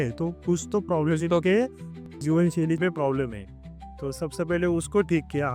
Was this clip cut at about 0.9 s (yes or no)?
no